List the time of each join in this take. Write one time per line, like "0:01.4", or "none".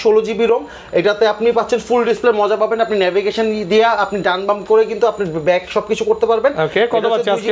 none